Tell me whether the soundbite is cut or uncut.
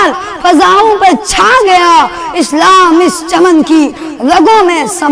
uncut